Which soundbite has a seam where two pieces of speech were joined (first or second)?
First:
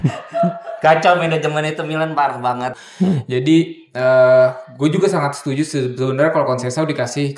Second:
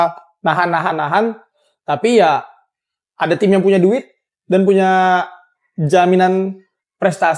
first